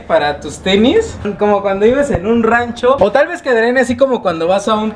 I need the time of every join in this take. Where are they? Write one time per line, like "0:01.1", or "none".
0:01.3